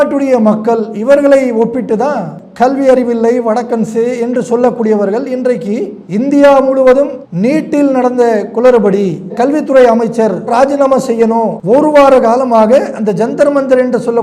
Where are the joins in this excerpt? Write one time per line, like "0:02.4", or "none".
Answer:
0:02.3
0:11.6